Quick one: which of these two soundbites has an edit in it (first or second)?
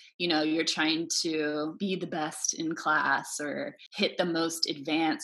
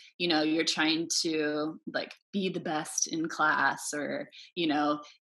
first